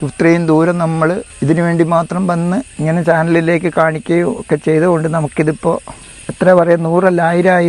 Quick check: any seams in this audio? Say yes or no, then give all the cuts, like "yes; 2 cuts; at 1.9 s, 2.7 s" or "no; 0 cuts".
yes; 3 cuts; at 1.3 s, 2.7 s, 6.3 s